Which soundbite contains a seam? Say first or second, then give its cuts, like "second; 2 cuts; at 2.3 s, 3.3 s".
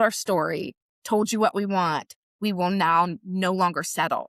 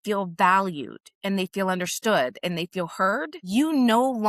second; 1 cut; at 3.4 s